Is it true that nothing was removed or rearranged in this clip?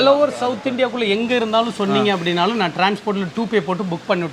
yes; 0 cuts

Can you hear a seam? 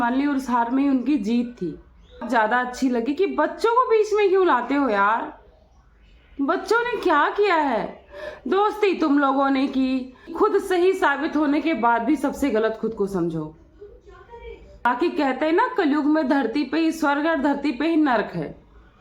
yes; 3 cuts; at 2.2 s, 10.3 s, 14.8 s

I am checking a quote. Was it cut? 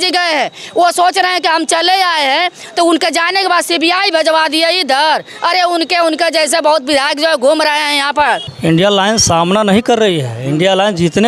yes; 1 cut; at 8.5 s

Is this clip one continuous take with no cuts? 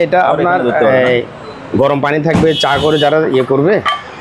yes; 0 cuts

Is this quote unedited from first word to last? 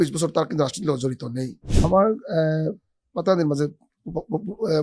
no; 1 cut; at 1.6 s

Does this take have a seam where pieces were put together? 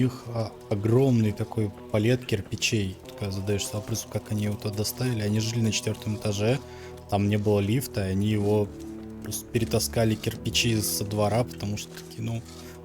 yes; 1 cut; at 3.1 s

